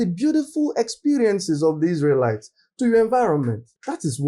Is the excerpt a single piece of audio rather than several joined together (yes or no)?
yes